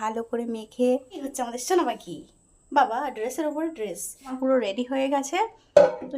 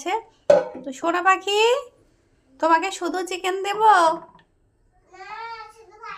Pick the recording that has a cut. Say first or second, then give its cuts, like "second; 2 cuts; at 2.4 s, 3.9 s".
first; 2 cuts; at 1.3 s, 4.3 s